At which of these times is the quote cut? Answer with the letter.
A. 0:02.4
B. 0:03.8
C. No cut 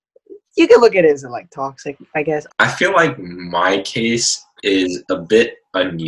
A